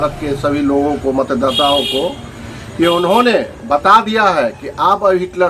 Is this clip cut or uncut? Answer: uncut